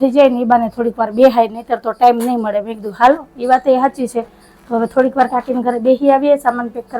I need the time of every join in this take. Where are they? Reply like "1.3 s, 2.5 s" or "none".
none